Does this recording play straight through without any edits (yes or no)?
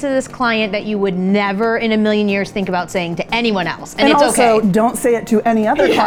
yes